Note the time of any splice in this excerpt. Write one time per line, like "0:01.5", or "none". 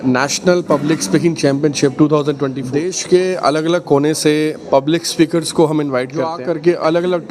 0:02.6
0:06.3